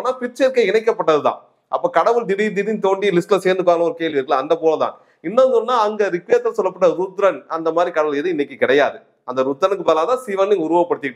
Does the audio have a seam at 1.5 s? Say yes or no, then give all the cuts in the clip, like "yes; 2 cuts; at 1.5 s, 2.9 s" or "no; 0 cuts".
no; 0 cuts